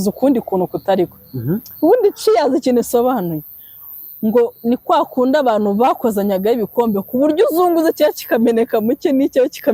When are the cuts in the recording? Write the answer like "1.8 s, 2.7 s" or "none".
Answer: none